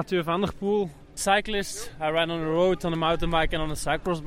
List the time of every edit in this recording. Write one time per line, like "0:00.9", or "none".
0:01.0